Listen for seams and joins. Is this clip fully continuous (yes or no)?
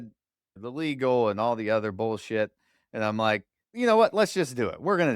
no